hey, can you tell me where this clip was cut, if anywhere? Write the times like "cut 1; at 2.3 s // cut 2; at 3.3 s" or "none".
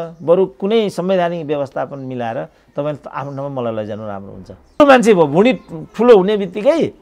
cut 1; at 4.8 s